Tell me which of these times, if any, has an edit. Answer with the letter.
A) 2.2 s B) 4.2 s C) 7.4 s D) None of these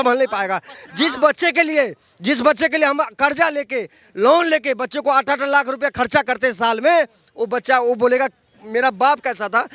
D